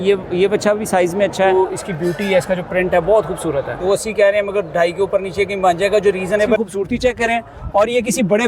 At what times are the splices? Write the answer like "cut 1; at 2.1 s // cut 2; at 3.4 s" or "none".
cut 1; at 1.5 s // cut 2; at 3.8 s // cut 3; at 6.6 s